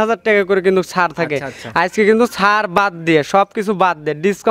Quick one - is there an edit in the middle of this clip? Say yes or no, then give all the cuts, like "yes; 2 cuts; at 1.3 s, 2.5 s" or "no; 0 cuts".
no; 0 cuts